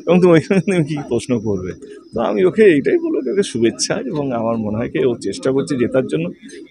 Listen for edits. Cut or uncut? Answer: uncut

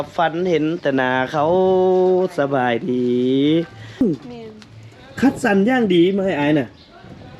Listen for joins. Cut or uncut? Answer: cut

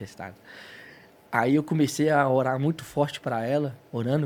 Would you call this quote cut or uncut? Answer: uncut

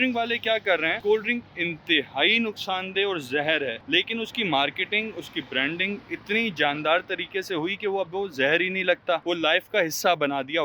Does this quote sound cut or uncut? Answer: cut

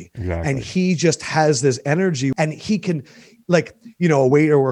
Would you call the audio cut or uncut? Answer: cut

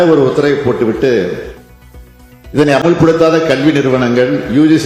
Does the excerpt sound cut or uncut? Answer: uncut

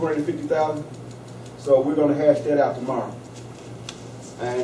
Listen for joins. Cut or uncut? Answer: uncut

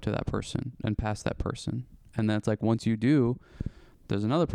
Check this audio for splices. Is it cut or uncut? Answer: uncut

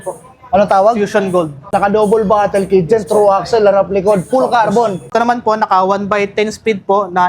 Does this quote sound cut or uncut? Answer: cut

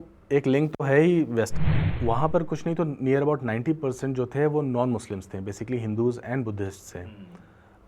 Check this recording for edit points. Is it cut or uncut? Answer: cut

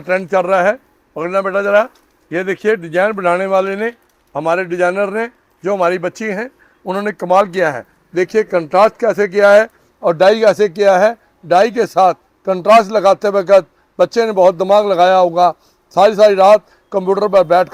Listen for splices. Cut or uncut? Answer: uncut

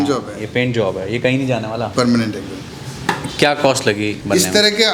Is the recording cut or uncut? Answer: uncut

